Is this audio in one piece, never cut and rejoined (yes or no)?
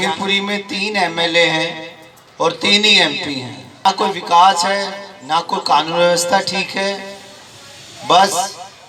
no